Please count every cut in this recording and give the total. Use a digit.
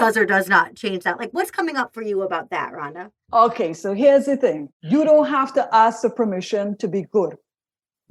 1